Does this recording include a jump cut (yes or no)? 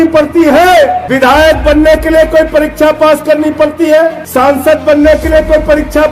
yes